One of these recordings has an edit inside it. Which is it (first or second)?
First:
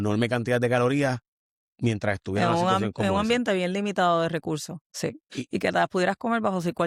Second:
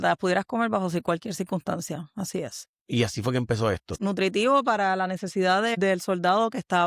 second